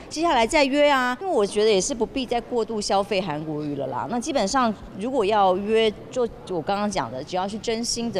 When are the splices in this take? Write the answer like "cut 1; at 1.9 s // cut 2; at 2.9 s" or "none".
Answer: cut 1; at 1.2 s